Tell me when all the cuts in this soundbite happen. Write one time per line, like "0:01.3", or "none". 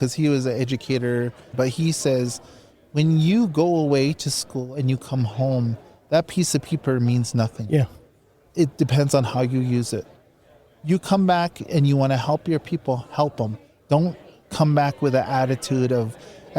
0:01.5